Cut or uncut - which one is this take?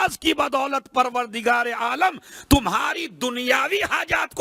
uncut